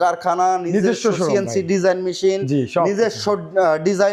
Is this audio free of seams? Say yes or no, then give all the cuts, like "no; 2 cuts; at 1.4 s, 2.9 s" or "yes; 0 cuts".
yes; 0 cuts